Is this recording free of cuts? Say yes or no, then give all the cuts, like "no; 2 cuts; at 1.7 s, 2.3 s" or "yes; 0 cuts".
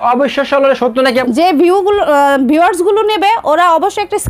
no; 1 cut; at 1.2 s